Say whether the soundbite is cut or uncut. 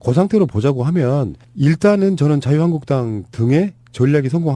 uncut